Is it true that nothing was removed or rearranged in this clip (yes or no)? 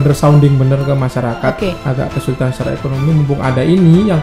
no